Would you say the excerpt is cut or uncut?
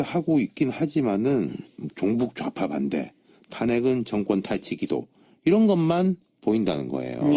uncut